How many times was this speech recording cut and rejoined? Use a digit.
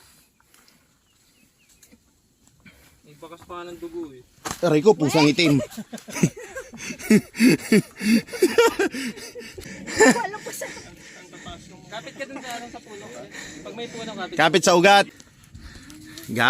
2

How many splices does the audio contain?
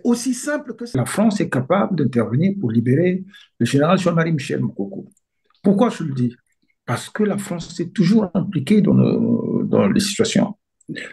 1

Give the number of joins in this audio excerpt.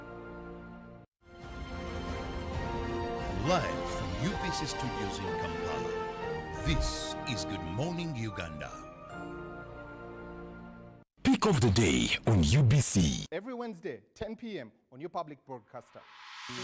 2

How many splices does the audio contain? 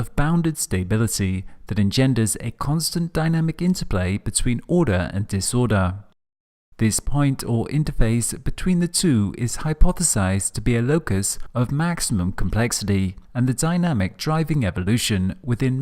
1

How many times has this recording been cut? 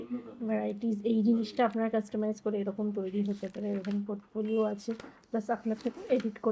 0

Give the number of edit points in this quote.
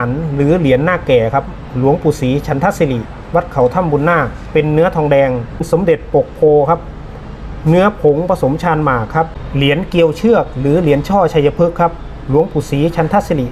2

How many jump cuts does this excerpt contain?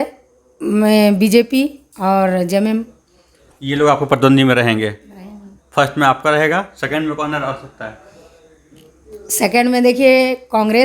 0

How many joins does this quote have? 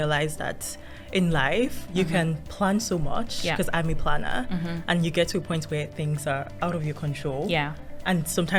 0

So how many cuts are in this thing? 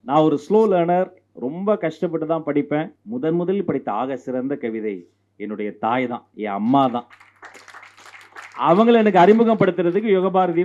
1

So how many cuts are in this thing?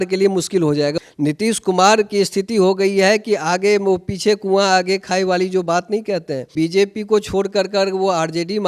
2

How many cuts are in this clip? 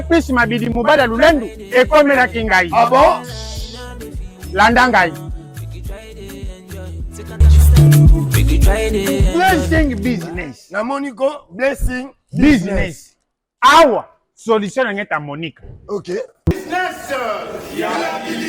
1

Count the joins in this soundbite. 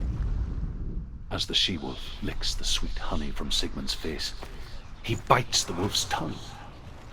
1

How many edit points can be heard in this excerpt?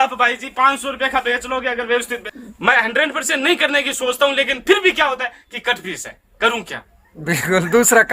1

